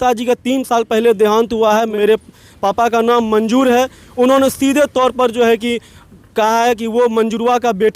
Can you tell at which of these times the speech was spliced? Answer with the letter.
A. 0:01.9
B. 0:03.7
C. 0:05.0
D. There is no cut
A